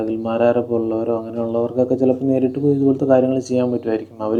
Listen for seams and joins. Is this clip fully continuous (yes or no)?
yes